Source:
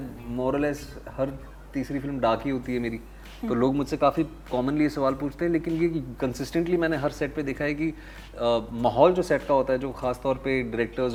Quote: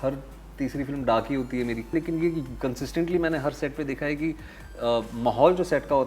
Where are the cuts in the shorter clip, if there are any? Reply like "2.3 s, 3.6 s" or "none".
1.9 s